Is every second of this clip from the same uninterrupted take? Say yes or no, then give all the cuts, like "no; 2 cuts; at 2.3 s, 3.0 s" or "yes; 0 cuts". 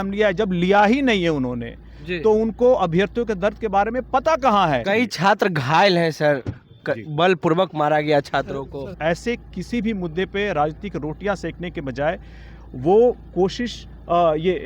no; 2 cuts; at 4.8 s, 8.8 s